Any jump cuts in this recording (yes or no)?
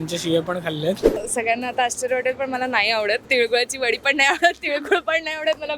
yes